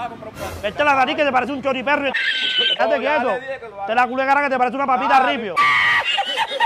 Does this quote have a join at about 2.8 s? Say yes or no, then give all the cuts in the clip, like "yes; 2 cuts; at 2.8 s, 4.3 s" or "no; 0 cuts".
yes; 1 cut; at 2.8 s